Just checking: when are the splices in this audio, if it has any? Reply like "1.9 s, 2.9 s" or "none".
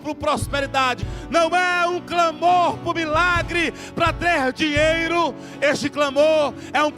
1.0 s

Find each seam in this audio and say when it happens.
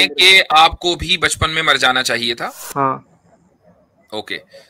2.6 s

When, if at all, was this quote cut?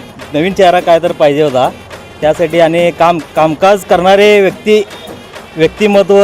1.8 s

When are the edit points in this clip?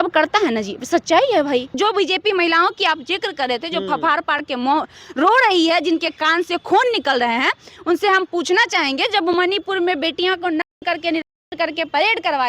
1.8 s

